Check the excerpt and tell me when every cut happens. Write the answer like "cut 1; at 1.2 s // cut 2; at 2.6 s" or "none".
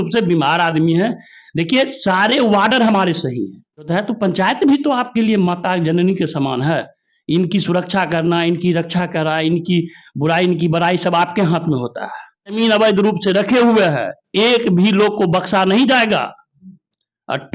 cut 1; at 3.9 s // cut 2; at 12.6 s